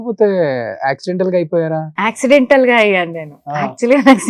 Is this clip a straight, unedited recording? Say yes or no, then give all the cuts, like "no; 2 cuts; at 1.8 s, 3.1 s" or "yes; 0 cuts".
yes; 0 cuts